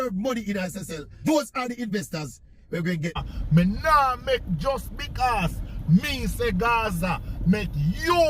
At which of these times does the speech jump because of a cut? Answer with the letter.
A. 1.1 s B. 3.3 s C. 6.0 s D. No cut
B